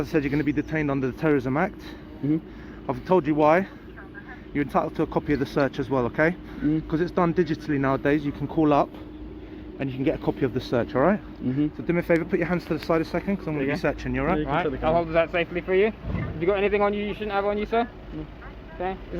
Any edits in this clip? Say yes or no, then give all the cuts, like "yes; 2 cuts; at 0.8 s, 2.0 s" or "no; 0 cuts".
yes; 1 cut; at 14.6 s